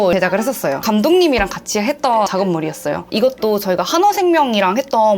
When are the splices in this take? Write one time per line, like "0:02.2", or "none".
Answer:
0:00.8
0:03.1